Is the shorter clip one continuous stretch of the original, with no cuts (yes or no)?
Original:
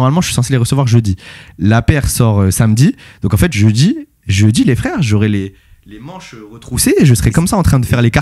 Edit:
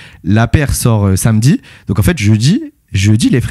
yes